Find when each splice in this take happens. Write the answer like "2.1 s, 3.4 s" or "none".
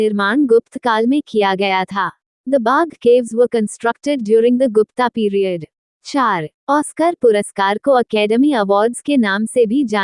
6.1 s